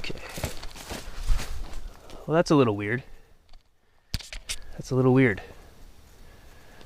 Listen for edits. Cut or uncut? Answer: uncut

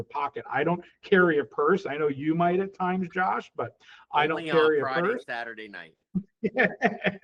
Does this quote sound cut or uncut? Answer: uncut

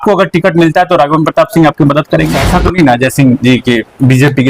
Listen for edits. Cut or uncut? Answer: cut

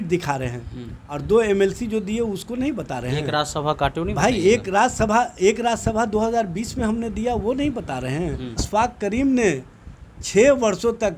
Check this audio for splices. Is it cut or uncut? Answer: cut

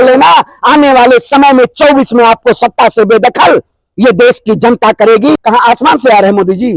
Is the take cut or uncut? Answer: cut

